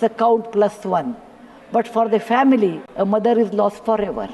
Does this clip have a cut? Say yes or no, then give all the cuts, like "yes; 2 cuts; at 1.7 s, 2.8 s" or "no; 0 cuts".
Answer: yes; 1 cut; at 2.8 s